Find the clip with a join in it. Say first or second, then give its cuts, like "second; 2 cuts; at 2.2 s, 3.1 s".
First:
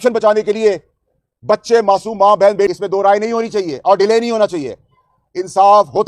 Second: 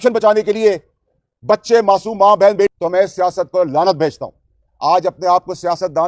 first; 1 cut; at 2.8 s